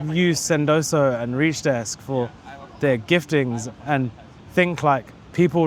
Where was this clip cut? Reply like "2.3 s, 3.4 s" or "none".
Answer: none